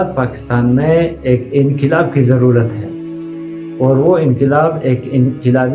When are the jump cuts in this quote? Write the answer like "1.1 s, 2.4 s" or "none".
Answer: none